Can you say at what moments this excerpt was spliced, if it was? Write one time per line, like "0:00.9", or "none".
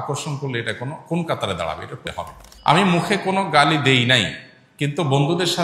0:02.0